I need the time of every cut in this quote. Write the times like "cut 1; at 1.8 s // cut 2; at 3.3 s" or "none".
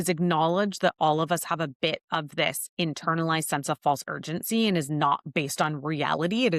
none